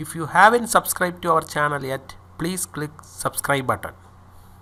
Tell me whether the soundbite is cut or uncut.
uncut